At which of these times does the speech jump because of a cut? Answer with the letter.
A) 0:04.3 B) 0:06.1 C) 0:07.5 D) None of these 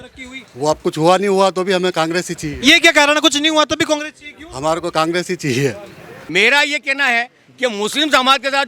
B